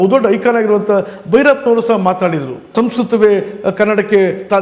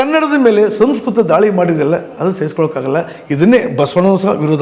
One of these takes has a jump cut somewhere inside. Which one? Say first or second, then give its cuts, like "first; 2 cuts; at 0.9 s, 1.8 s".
first; 1 cut; at 2.7 s